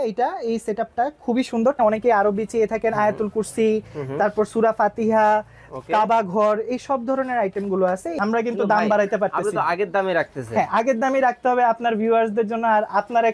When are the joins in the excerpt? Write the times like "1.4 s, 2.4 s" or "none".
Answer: 1.8 s, 8.1 s